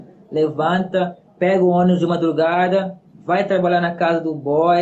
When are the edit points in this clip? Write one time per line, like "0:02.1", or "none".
0:01.2